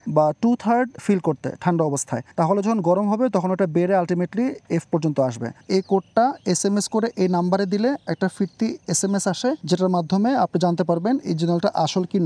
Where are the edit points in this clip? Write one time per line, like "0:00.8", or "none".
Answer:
0:01.0
0:02.2
0:05.5
0:09.6